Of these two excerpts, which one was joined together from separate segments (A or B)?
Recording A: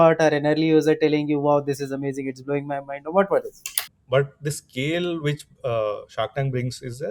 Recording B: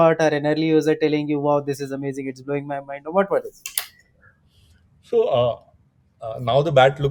A